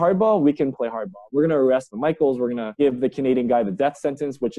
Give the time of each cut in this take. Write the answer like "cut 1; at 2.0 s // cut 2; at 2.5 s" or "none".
none